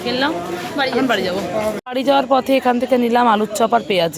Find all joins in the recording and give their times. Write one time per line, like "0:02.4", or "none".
0:01.8